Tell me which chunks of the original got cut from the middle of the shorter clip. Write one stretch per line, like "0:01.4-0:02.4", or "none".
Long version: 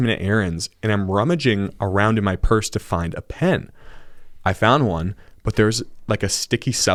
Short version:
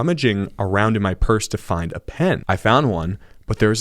0:03.6-0:04.4